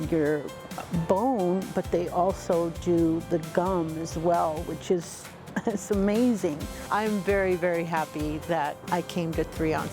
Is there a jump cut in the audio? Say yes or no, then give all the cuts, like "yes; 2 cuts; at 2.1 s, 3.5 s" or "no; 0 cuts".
yes; 2 cuts; at 6.9 s, 8.8 s